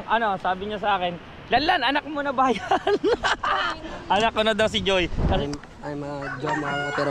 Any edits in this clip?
yes; 1 cut; at 5.4 s

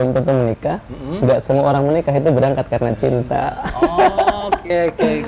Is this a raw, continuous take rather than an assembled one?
yes; 0 cuts

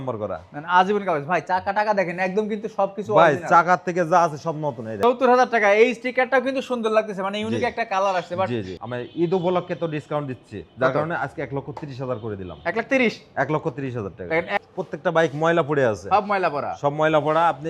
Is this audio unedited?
no; 3 cuts; at 4.9 s, 8.7 s, 14.6 s

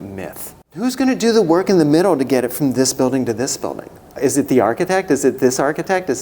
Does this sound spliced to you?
yes; 2 cuts; at 0.8 s, 4.1 s

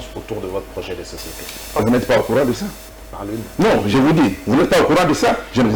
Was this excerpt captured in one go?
no; 1 cut; at 1.8 s

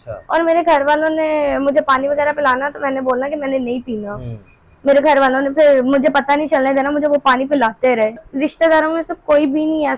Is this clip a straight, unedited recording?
no; 1 cut; at 8.3 s

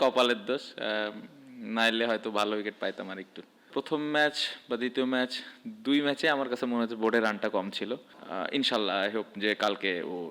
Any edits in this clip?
yes; 2 cuts; at 3.7 s, 8.2 s

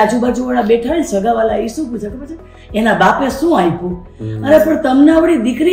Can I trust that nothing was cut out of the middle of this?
yes; 0 cuts

